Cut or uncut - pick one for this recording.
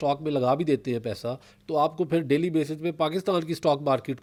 uncut